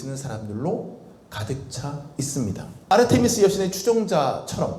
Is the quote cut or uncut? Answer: cut